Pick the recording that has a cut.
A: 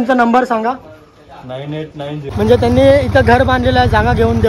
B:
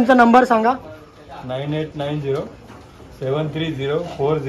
A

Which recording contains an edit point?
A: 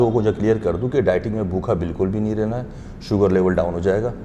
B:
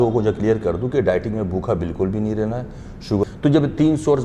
B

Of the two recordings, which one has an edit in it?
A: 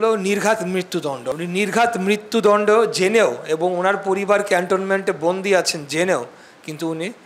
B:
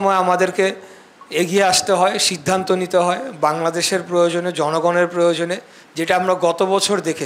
A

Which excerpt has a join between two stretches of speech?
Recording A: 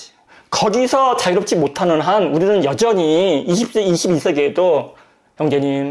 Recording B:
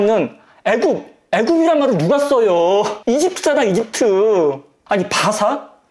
B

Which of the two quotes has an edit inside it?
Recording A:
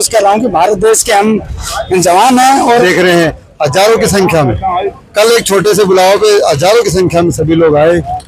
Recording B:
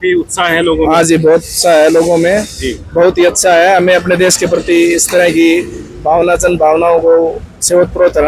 A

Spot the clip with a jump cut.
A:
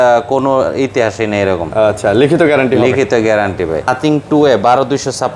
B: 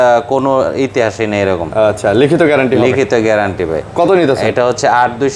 A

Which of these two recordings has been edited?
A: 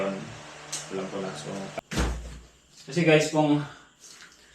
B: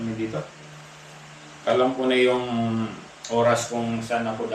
A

